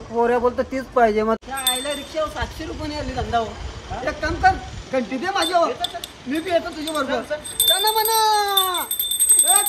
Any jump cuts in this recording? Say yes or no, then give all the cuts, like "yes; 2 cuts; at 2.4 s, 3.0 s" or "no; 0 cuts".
yes; 1 cut; at 1.4 s